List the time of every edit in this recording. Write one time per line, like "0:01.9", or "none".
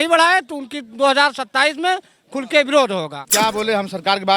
0:03.2